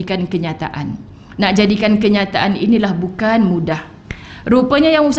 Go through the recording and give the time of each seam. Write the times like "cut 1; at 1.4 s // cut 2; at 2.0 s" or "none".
cut 1; at 3.9 s